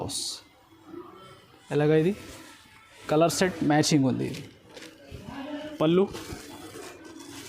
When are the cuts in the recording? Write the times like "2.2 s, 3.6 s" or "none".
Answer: 5.8 s